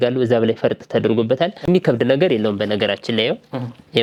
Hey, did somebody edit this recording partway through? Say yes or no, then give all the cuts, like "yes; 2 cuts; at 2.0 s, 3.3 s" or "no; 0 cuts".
no; 0 cuts